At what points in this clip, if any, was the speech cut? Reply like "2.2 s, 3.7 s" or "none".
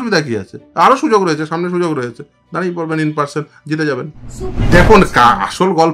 4.7 s